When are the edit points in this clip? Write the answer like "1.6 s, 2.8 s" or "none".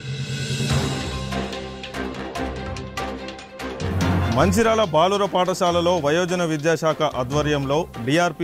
0.9 s